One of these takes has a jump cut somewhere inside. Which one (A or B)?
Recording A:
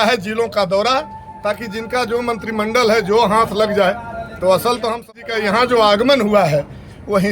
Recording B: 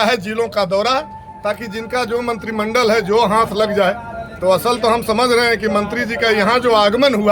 A